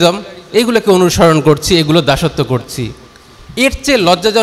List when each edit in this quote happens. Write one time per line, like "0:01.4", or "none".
none